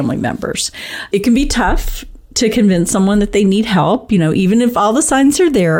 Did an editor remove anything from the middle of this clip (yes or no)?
no